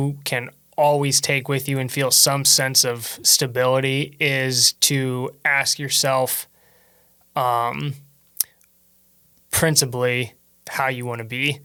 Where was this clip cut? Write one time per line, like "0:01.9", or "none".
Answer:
none